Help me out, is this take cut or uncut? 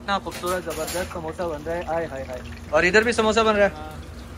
uncut